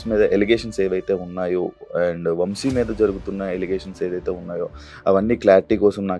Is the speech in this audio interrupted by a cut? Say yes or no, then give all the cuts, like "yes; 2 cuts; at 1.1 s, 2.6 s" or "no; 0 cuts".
no; 0 cuts